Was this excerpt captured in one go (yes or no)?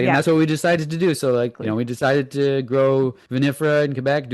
no